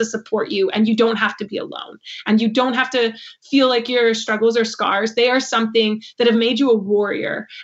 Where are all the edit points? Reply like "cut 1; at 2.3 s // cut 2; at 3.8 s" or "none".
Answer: none

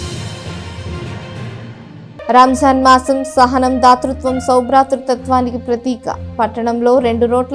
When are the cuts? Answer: cut 1; at 2.3 s

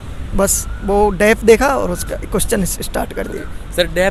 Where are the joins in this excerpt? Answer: none

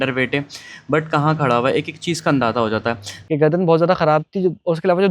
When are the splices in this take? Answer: cut 1; at 3.1 s

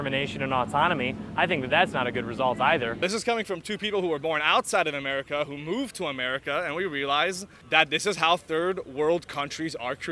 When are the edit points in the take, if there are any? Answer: cut 1; at 2.9 s // cut 2; at 7.5 s

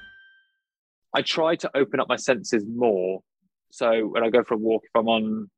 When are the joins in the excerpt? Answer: cut 1; at 1.0 s

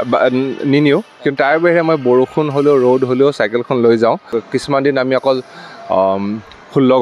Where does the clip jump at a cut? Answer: cut 1; at 4.7 s

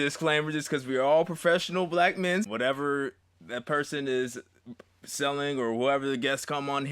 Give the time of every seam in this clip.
cut 1; at 2.5 s

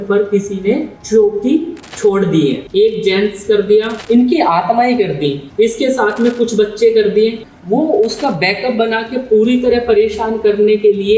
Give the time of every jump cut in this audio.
cut 1; at 1.0 s // cut 2; at 1.8 s // cut 3; at 2.6 s // cut 4; at 4.0 s // cut 5; at 5.4 s // cut 6; at 7.5 s

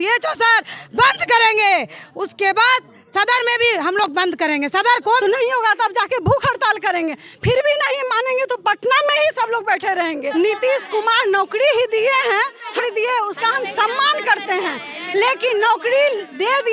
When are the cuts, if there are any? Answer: cut 1; at 5.2 s // cut 2; at 10.3 s // cut 3; at 12.7 s

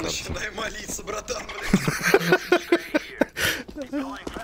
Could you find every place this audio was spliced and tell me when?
none

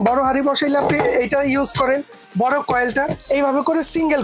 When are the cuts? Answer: cut 1; at 3.2 s

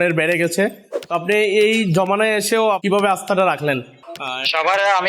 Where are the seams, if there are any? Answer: cut 1; at 2.8 s // cut 2; at 4.0 s

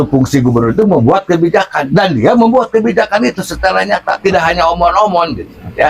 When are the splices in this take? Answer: none

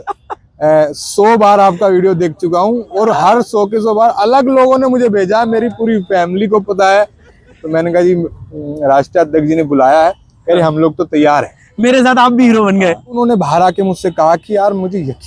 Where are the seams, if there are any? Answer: cut 1; at 13.2 s

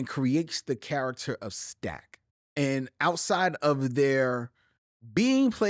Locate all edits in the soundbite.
cut 1; at 2.4 s

